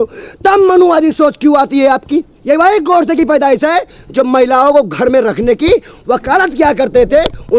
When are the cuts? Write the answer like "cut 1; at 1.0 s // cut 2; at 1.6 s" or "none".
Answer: cut 1; at 2.3 s